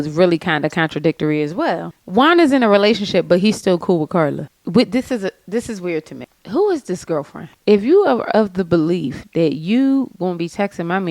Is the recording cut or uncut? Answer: cut